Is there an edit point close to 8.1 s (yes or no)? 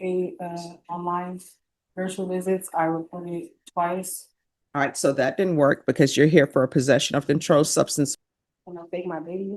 yes